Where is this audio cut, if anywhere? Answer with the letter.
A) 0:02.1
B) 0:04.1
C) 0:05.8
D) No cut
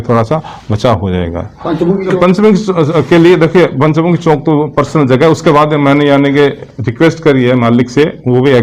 A